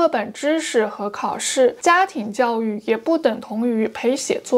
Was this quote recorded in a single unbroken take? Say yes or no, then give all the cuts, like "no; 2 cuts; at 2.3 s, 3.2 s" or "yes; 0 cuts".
yes; 0 cuts